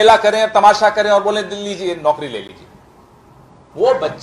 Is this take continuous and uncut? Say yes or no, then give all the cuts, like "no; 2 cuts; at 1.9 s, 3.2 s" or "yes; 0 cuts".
yes; 0 cuts